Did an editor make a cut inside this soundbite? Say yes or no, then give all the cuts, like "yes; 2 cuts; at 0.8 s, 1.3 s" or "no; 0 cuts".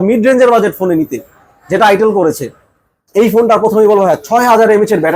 no; 0 cuts